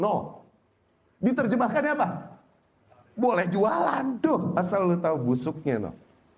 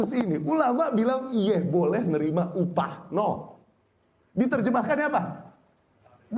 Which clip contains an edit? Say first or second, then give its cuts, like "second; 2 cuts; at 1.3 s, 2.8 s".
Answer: first; 1 cut; at 4.2 s